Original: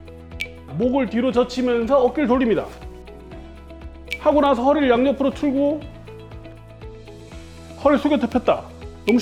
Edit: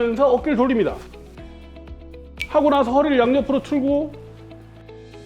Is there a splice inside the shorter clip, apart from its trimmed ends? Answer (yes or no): yes